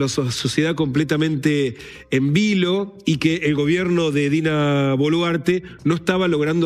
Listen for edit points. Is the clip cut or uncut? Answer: uncut